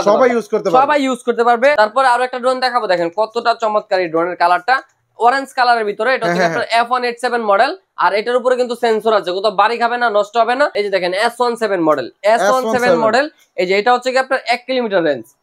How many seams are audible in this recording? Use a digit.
2